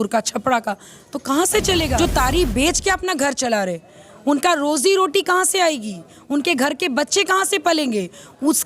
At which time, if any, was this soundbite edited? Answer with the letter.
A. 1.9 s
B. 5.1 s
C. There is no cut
A